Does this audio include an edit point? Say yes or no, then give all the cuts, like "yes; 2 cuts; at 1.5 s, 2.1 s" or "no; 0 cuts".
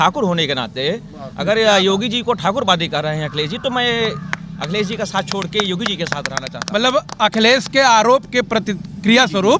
no; 0 cuts